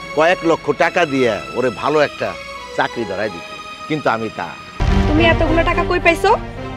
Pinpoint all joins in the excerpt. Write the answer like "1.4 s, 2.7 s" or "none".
4.8 s